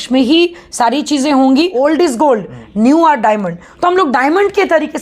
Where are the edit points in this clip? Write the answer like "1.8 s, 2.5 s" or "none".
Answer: 1.7 s